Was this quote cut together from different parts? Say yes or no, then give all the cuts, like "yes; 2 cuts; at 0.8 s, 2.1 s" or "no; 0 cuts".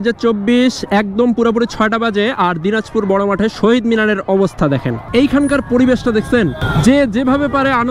yes; 2 cuts; at 5.1 s, 6.6 s